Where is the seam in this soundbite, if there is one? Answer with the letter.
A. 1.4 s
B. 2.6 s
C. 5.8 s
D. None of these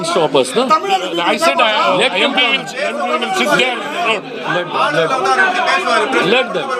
D